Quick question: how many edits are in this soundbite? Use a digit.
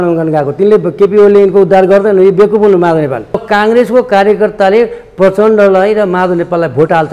1